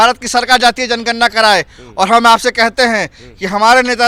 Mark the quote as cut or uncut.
uncut